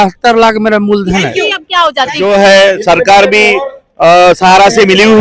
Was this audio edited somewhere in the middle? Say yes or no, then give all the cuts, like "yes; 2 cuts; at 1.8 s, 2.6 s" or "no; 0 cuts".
yes; 1 cut; at 2.2 s